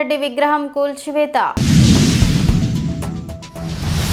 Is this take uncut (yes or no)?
yes